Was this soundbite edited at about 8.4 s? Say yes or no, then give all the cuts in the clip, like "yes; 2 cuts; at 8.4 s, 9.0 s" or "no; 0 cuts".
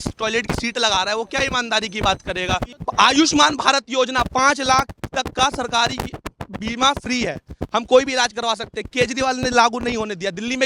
no; 1 cut; at 2.7 s